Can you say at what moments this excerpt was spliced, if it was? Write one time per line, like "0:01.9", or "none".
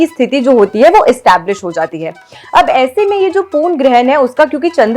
none